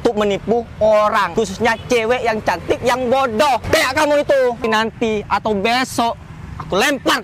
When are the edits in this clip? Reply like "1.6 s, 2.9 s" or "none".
1.3 s, 3.6 s, 4.6 s